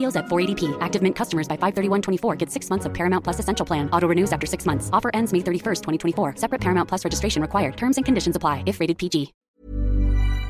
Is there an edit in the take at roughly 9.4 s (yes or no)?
yes